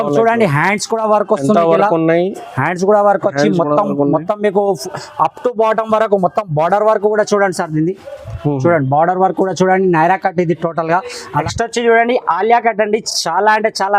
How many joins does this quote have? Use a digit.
1